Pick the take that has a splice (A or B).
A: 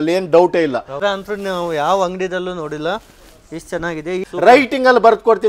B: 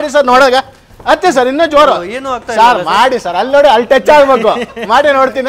A